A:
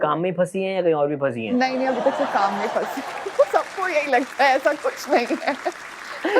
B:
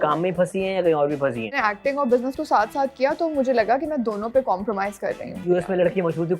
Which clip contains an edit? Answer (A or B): B